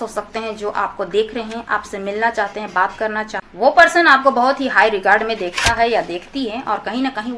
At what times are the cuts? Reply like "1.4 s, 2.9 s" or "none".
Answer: 3.4 s